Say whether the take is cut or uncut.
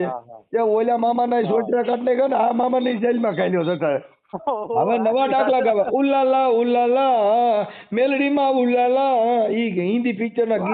cut